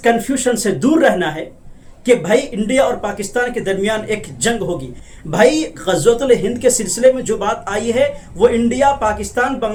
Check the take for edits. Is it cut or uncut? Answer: uncut